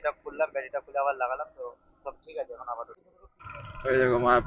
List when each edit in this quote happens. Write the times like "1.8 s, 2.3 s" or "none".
2.8 s